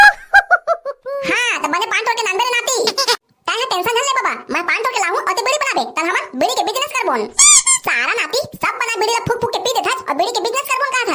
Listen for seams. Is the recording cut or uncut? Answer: uncut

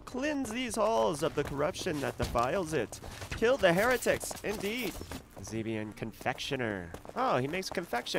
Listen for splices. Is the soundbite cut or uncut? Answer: cut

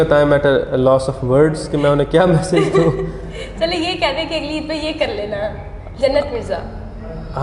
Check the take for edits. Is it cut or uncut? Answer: uncut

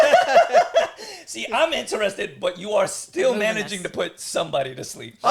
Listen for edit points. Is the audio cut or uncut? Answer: uncut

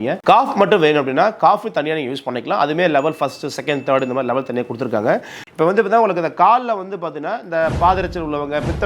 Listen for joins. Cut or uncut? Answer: cut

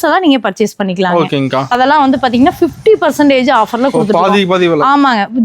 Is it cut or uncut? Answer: cut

